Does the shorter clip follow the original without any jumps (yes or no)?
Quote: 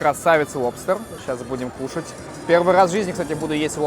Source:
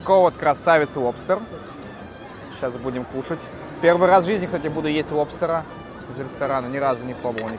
no